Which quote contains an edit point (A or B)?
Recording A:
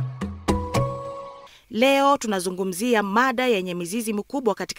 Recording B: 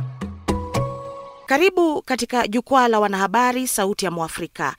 A